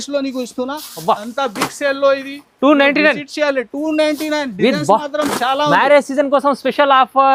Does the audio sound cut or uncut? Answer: uncut